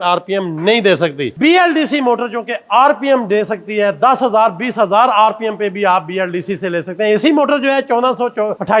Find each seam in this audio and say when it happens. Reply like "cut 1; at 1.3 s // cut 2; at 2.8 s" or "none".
cut 1; at 1.3 s